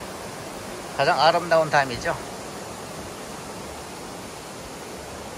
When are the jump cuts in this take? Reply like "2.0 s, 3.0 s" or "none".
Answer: none

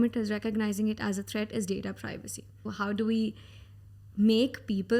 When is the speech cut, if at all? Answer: 2.7 s

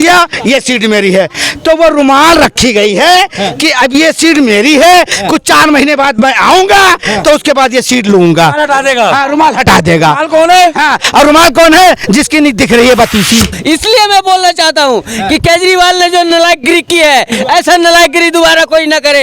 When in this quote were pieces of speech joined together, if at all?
13.5 s

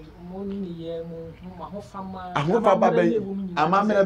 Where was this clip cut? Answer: none

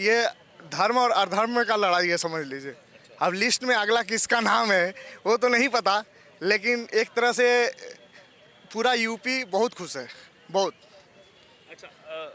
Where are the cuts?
none

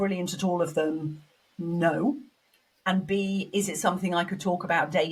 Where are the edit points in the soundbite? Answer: none

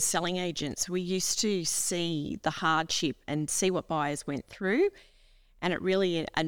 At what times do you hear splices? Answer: none

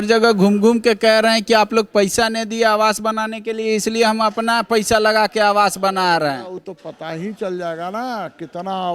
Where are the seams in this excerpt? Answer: none

